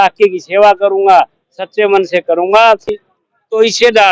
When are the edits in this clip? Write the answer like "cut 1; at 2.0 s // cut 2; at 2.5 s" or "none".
cut 1; at 3.0 s